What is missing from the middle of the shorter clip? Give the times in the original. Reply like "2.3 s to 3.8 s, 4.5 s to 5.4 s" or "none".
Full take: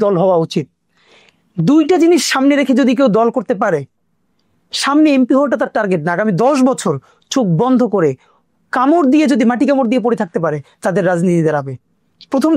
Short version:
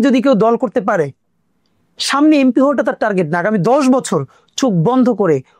none